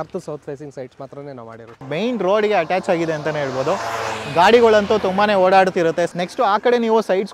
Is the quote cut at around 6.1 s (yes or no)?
yes